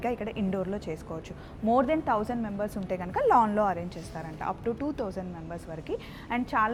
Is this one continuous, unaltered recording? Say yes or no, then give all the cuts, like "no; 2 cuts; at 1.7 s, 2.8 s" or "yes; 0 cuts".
yes; 0 cuts